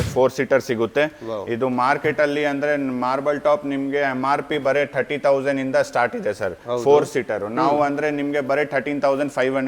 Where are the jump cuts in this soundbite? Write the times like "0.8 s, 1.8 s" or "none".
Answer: none